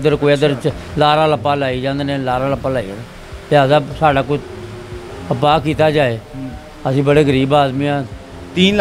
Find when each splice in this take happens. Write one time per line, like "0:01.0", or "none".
none